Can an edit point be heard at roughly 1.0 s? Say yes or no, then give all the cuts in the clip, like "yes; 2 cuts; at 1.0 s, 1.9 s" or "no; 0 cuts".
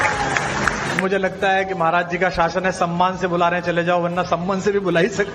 yes; 1 cut; at 1.0 s